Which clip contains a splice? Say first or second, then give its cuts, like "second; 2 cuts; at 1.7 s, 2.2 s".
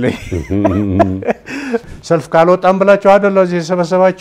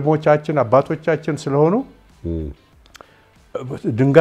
first; 1 cut; at 1.9 s